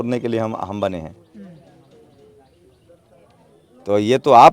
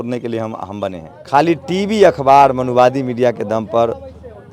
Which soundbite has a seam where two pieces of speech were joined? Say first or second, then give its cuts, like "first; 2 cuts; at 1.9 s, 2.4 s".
second; 1 cut; at 1.1 s